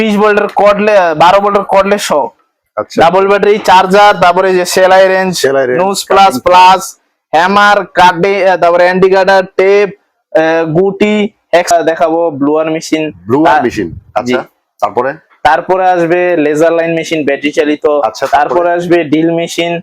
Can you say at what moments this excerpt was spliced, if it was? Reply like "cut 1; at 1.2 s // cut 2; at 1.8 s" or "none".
cut 1; at 11.7 s